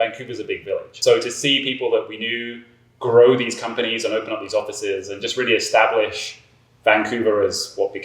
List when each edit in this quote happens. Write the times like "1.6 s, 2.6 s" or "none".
0.9 s